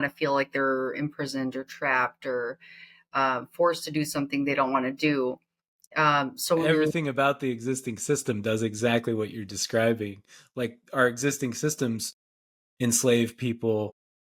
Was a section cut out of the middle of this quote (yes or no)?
no